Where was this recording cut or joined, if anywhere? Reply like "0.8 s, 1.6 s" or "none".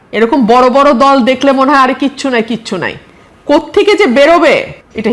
none